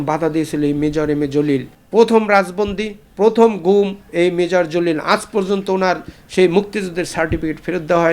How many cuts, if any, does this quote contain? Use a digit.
1